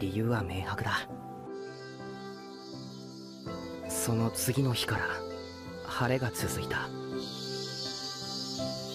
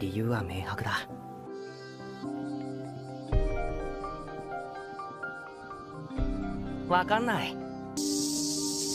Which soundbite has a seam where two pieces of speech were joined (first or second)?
first